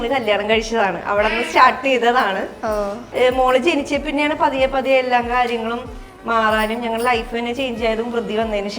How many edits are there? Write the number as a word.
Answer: one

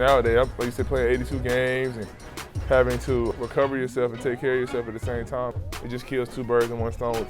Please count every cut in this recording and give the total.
two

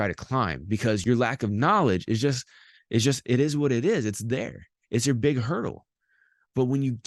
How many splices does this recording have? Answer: one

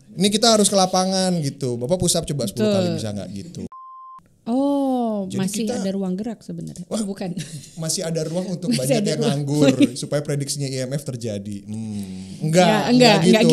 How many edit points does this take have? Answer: one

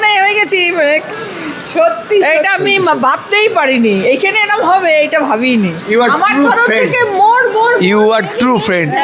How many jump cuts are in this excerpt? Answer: zero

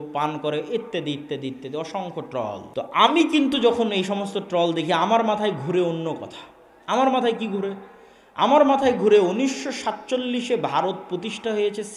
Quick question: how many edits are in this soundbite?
one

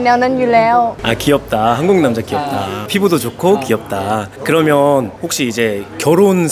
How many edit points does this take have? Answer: zero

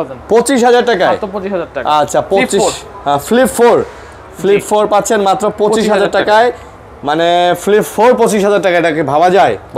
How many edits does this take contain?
zero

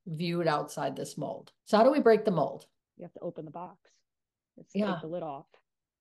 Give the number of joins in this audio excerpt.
two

